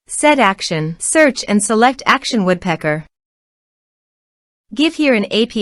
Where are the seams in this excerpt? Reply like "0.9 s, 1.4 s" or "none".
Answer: 1.0 s